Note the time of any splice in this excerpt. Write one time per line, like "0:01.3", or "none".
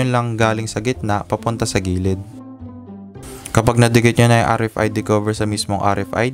none

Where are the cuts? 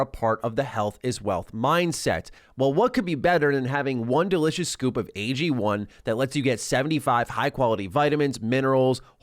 0:02.4

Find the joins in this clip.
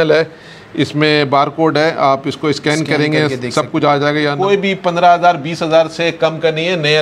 0:04.3

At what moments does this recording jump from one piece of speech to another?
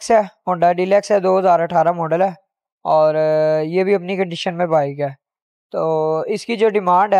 none

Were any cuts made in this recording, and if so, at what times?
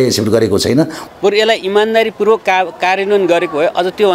0:01.0

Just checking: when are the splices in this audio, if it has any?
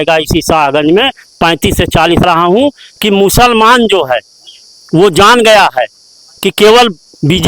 0:02.2

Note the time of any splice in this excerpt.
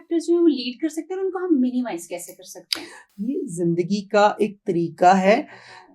0:03.1

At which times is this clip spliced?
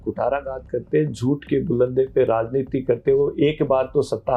none

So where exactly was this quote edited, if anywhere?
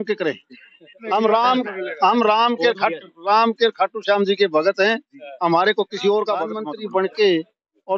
0:01.0
0:06.6

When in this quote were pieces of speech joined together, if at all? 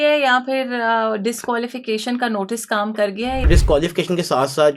0:03.5

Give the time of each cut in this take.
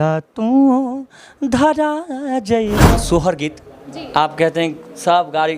0:03.0

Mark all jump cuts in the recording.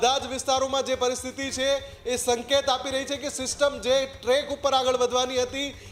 none

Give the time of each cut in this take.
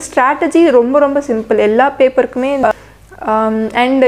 0:02.6

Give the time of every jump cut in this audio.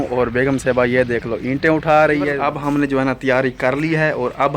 0:02.4

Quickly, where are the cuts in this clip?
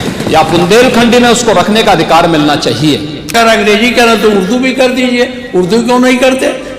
0:03.3

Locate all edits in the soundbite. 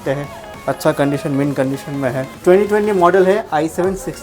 0:02.4

